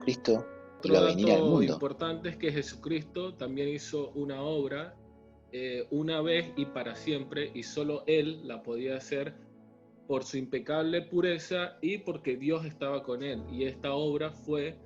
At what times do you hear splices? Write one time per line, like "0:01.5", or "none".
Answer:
0:01.8